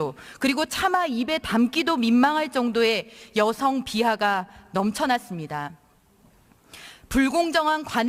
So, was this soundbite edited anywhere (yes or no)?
no